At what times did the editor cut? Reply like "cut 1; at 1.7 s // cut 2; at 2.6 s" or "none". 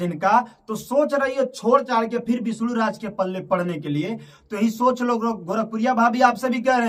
none